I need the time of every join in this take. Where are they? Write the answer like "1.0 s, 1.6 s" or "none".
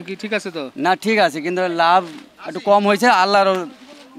none

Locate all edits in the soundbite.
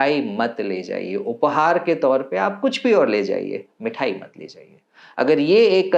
none

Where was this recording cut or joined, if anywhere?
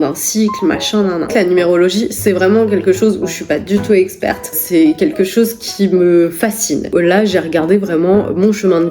1.3 s, 6.9 s

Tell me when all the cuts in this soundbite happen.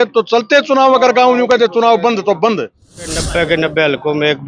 3.2 s

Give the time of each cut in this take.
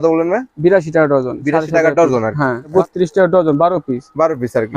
2.7 s

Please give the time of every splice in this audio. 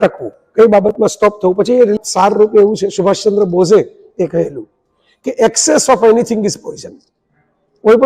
1.9 s

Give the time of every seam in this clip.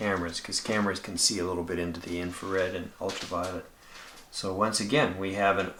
none

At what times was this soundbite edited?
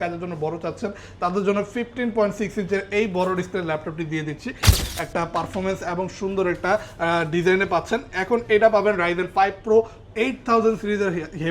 4.8 s

